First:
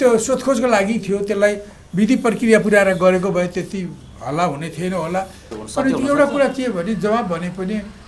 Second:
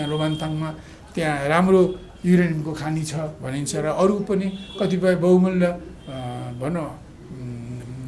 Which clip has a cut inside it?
first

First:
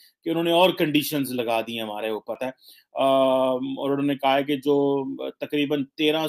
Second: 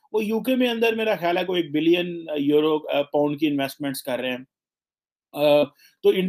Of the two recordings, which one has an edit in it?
first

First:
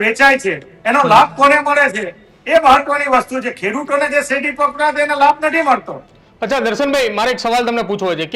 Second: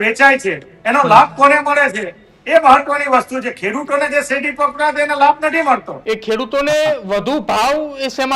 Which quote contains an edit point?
second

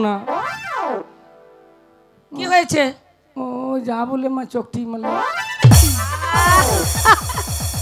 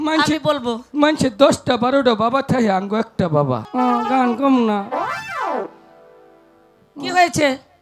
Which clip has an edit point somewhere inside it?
second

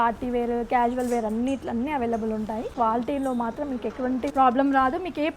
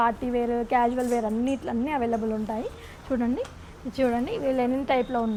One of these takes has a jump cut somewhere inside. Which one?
first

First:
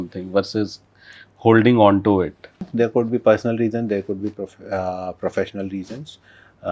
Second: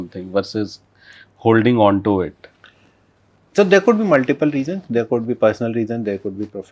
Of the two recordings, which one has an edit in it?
first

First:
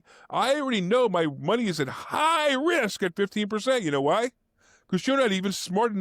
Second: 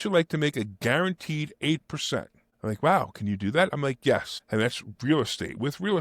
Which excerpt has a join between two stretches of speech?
second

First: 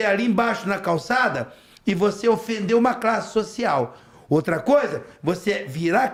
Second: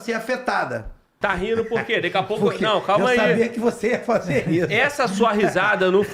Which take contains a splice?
second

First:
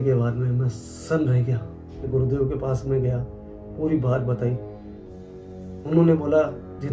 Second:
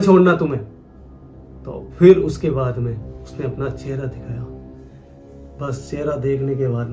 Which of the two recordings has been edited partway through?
first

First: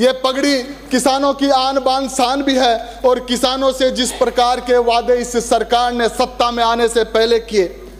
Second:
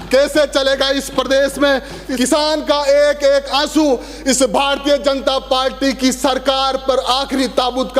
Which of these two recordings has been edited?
second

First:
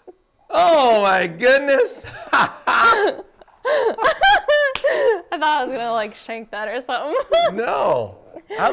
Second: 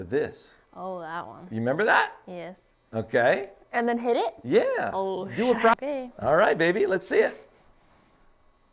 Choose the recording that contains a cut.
second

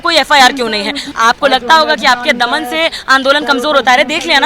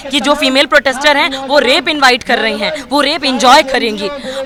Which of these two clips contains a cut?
first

